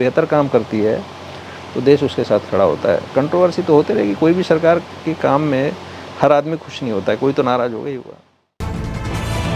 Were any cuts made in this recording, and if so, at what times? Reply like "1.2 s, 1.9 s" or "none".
8.6 s